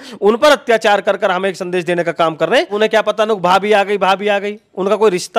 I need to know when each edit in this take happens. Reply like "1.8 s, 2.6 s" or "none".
2.7 s